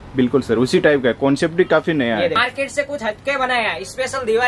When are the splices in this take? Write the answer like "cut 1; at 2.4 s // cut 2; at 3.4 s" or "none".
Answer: cut 1; at 2.4 s